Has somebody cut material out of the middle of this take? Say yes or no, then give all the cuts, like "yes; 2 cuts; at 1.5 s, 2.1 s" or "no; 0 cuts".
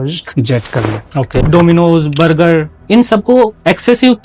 yes; 2 cuts; at 1.4 s, 2.8 s